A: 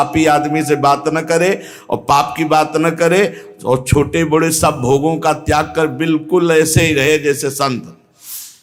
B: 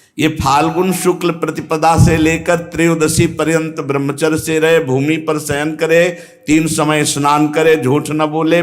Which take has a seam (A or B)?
B